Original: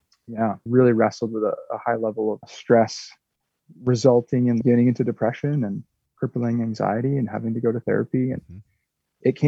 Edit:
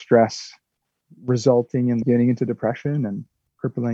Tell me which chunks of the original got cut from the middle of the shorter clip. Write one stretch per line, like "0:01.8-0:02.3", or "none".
none